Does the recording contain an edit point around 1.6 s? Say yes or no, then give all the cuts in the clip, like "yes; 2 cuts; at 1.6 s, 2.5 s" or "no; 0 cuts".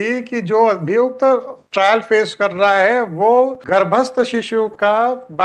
no; 1 cut; at 3.6 s